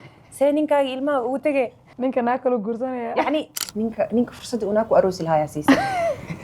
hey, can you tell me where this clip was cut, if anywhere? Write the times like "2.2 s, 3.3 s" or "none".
1.8 s, 3.7 s